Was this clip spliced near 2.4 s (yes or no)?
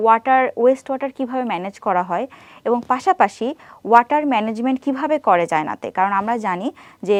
no